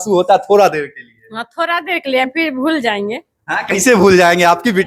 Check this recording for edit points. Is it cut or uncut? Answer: uncut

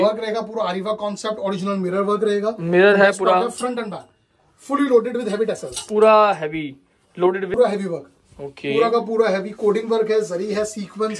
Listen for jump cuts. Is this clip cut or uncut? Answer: cut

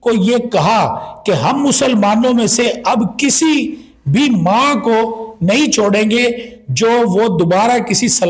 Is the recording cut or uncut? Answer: uncut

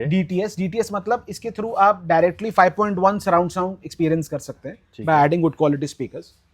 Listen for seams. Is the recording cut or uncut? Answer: uncut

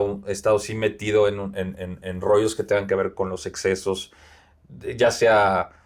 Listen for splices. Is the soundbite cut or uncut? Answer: uncut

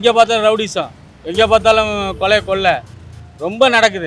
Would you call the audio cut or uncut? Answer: uncut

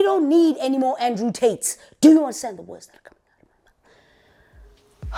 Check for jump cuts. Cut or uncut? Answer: uncut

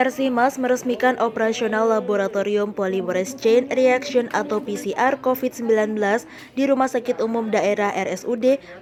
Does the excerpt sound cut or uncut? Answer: uncut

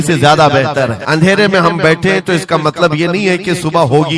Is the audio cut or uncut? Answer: cut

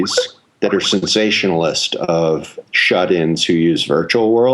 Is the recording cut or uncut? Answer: cut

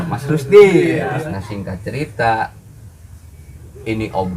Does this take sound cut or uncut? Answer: cut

